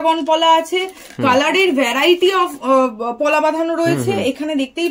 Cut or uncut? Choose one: uncut